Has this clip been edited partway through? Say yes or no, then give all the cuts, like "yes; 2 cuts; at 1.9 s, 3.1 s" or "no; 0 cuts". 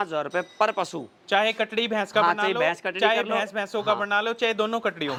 no; 0 cuts